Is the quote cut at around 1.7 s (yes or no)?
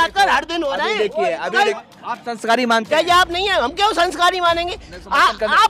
yes